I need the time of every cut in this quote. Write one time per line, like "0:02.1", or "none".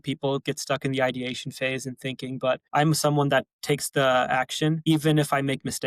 0:02.6
0:03.5
0:04.8